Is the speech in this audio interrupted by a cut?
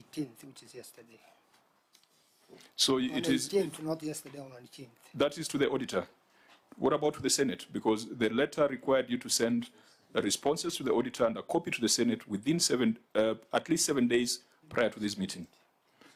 no; 0 cuts

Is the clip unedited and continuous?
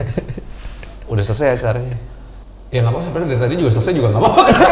yes; 0 cuts

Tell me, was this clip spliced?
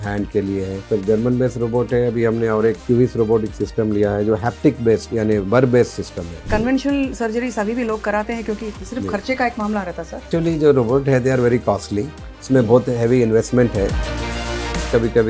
yes; 6 cuts; at 0.8 s, 2.8 s, 6.4 s, 8.8 s, 10.3 s, 14.3 s

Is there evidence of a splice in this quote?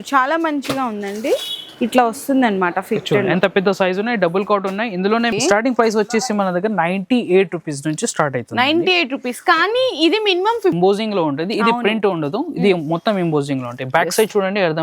yes; 2 cuts; at 5.3 s, 10.8 s

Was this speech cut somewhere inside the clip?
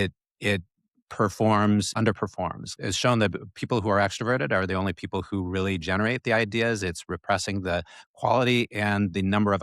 yes; 1 cut; at 2.2 s

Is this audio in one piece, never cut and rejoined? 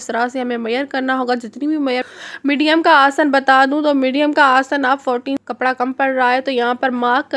no; 2 cuts; at 2.0 s, 5.4 s

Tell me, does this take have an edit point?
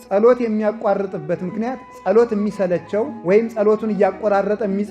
no; 0 cuts

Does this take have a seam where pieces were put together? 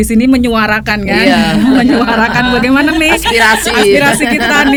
no; 0 cuts

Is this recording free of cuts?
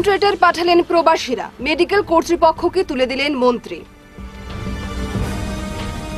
yes; 0 cuts

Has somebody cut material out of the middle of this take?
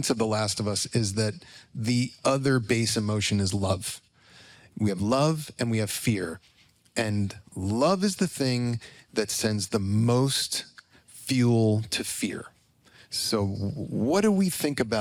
no; 0 cuts

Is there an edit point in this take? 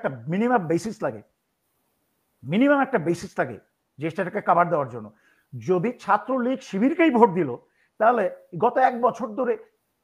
no; 0 cuts

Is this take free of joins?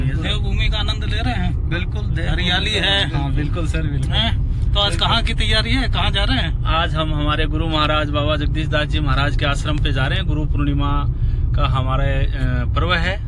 yes; 0 cuts

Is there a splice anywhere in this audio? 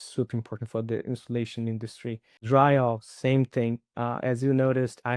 yes; 1 cut; at 2.5 s

